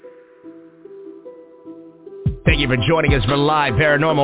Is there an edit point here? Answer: yes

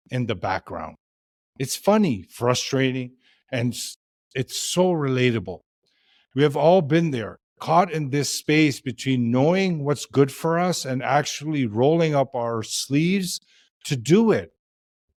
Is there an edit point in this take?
no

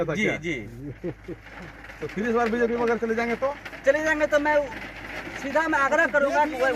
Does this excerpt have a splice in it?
no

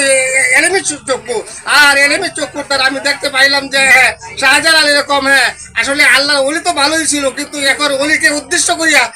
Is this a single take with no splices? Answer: yes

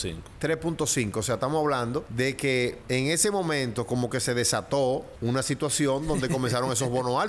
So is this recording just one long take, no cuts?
no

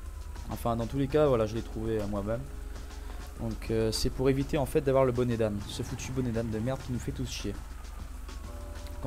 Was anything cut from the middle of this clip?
no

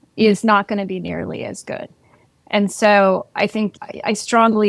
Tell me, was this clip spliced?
no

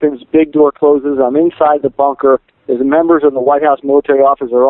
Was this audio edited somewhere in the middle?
no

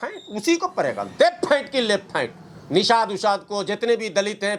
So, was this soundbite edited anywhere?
no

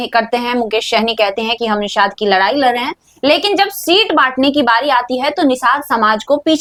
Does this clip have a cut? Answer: no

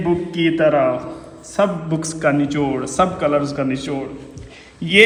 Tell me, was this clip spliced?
no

